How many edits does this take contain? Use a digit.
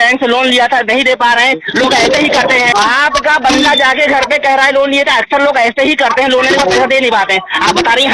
1